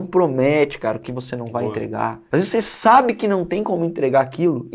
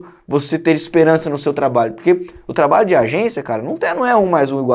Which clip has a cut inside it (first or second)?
first